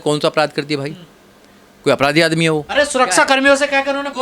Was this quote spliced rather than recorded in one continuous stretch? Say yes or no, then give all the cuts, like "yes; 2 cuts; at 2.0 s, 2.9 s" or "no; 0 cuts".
no; 0 cuts